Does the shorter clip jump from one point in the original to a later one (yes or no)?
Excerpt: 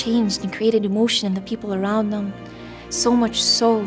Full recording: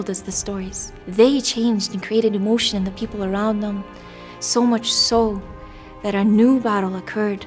no